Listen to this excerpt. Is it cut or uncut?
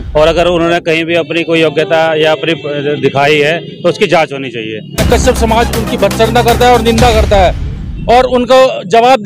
cut